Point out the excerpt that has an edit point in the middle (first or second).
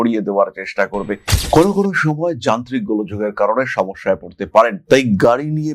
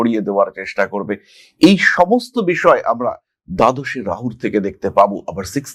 first